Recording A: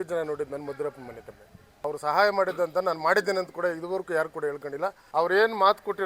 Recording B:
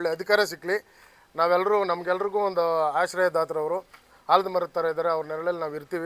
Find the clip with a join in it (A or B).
A